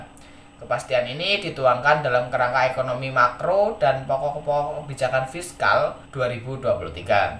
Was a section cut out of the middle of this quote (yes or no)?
yes